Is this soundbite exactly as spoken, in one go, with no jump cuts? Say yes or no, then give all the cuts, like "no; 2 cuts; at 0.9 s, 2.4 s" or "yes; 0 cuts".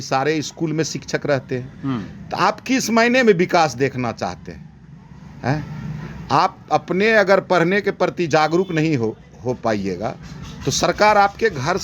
yes; 0 cuts